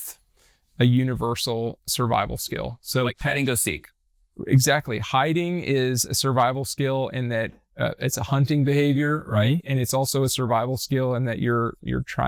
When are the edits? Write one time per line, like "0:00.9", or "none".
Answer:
none